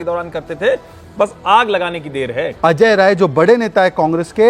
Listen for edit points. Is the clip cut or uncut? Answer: cut